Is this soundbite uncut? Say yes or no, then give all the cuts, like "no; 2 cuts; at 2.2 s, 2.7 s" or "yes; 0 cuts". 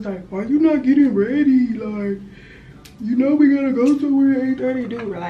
yes; 0 cuts